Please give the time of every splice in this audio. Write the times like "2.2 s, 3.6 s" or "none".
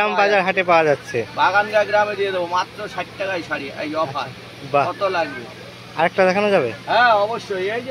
none